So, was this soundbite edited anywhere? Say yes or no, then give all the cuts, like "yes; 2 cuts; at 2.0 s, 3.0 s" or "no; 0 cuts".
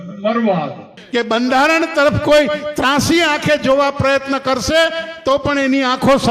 yes; 1 cut; at 0.9 s